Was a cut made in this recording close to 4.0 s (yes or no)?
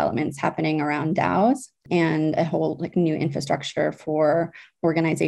no